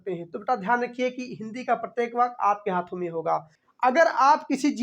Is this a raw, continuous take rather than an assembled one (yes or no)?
no